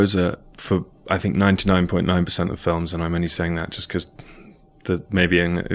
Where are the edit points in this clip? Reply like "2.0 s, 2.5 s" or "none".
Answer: 0.9 s